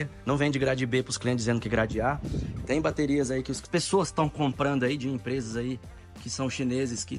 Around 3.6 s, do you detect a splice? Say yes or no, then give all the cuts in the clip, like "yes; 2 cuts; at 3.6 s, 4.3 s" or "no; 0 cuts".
yes; 1 cut; at 3.6 s